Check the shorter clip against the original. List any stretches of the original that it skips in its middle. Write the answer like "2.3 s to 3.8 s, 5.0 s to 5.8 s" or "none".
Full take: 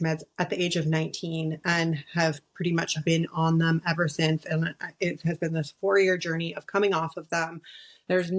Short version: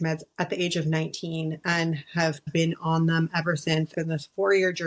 2.4 s to 2.9 s, 4.4 s to 5.4 s